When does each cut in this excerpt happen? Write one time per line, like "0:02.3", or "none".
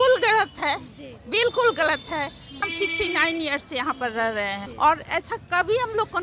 0:02.6
0:04.6